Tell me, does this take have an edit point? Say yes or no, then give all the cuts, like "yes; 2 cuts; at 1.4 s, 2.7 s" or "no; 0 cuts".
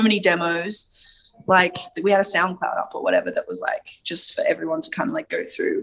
no; 0 cuts